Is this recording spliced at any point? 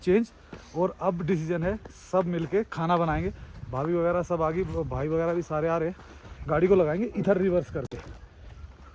no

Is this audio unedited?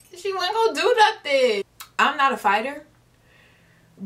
no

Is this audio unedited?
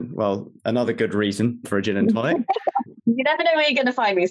yes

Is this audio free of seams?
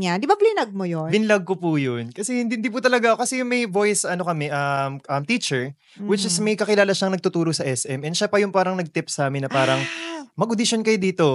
yes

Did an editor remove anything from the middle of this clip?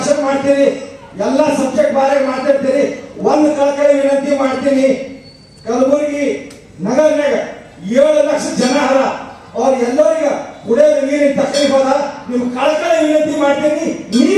no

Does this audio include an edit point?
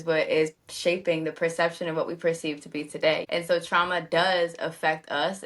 yes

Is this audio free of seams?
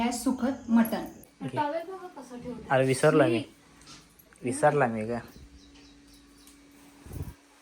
no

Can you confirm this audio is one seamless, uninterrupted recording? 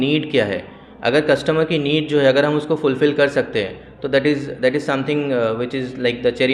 yes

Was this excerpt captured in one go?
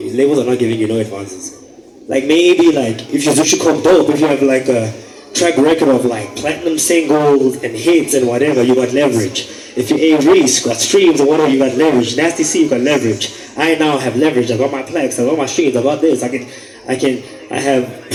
yes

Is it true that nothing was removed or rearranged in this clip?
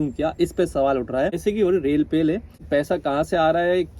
no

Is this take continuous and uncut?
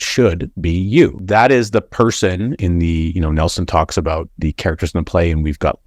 yes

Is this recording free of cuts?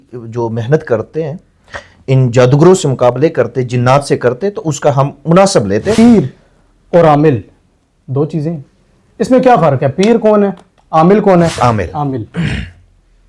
no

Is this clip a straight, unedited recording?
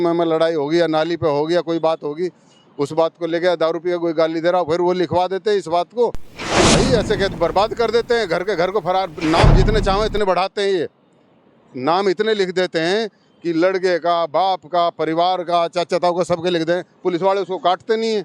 no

